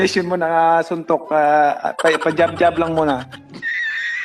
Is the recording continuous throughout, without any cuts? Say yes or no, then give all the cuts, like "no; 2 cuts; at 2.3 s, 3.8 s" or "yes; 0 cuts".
no; 1 cut; at 3.3 s